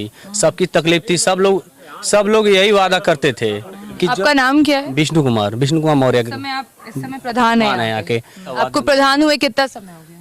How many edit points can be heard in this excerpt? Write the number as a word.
one